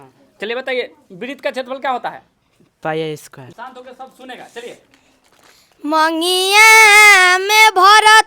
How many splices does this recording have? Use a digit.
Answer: 1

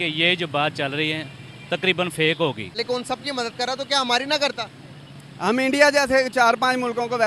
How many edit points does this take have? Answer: 1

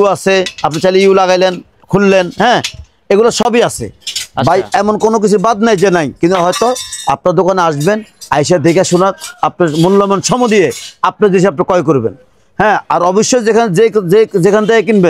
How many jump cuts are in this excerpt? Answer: 0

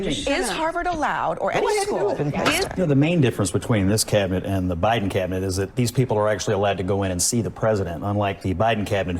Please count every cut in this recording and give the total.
1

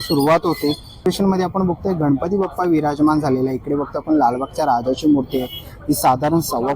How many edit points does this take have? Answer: 1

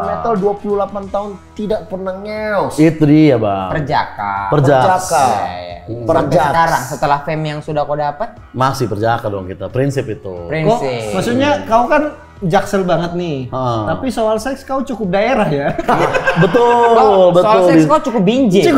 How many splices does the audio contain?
0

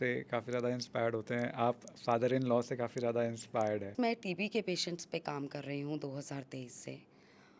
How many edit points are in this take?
1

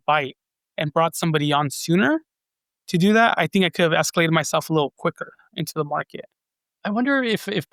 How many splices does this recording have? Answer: 0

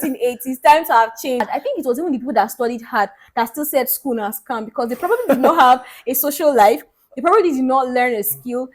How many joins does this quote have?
1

